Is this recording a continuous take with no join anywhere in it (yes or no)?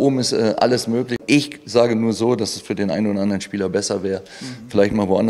no